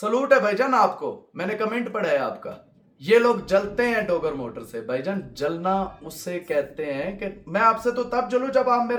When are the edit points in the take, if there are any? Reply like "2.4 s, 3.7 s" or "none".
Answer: none